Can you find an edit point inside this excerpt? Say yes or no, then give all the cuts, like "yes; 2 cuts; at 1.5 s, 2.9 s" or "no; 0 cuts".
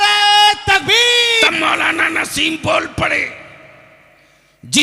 yes; 1 cut; at 1.4 s